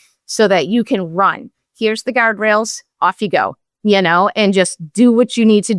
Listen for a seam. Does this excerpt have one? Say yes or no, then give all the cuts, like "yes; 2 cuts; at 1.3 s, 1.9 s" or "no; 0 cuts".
no; 0 cuts